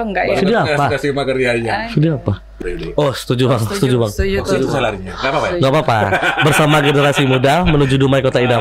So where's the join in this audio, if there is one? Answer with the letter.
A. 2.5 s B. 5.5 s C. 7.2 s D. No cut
A